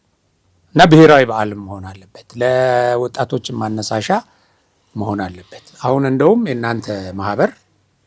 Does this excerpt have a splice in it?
no; 0 cuts

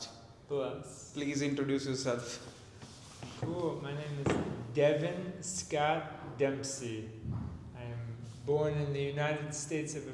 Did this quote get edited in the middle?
no; 0 cuts

